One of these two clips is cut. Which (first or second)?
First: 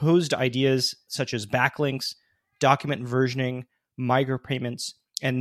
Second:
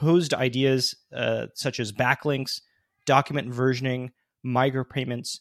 first